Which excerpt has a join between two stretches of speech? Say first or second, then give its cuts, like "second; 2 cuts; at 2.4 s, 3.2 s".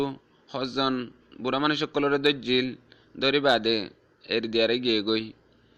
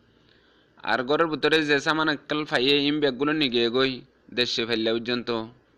first; 1 cut; at 1.8 s